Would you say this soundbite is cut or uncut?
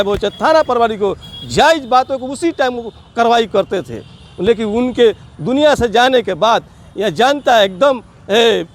uncut